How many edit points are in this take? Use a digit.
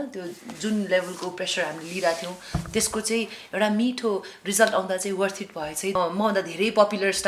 1